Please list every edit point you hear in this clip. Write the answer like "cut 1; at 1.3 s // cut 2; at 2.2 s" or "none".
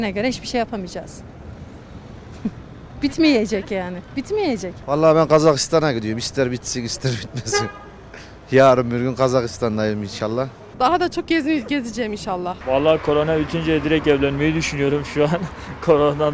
cut 1; at 4.8 s // cut 2; at 10.6 s // cut 3; at 12.5 s